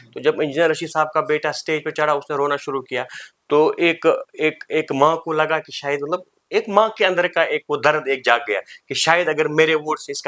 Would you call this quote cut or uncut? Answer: uncut